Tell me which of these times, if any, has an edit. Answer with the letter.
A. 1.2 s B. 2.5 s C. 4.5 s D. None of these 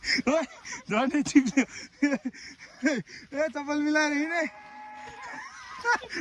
D